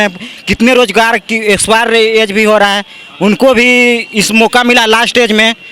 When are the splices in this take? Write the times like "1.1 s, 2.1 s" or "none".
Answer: none